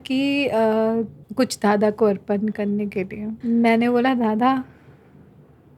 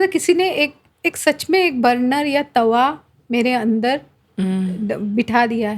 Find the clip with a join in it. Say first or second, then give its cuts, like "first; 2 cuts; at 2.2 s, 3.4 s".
first; 2 cuts; at 1.2 s, 3.4 s